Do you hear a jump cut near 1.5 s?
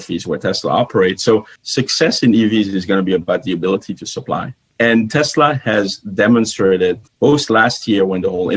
yes; 1 cut; at 1.5 s

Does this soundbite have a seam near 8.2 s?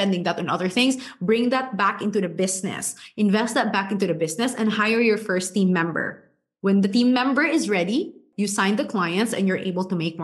yes; 1 cut; at 8.2 s

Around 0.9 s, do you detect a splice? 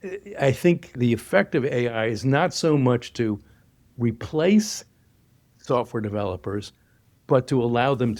yes; 1 cut; at 0.9 s

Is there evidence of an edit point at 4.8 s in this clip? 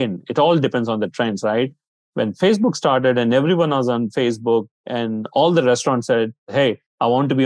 yes; 2 cuts; at 4.8 s, 6.5 s

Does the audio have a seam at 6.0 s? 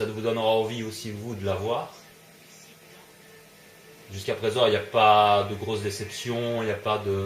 no; 1 cut; at 1.4 s

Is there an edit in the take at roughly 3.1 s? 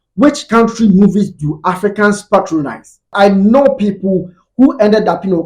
yes; 1 cut; at 3.1 s

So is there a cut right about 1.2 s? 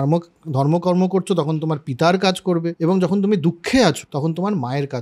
no; 2 cuts; at 2.7 s, 4.1 s

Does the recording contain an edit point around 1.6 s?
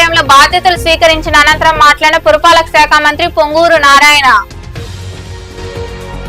no; 0 cuts

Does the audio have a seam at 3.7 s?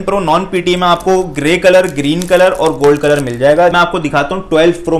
yes; 1 cut; at 3.7 s

